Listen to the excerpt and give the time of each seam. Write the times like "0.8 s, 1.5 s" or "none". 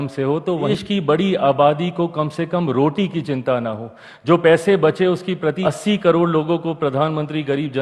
0.7 s, 5.6 s